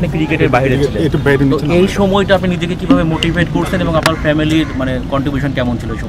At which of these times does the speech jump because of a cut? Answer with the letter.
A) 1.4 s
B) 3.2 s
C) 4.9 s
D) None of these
D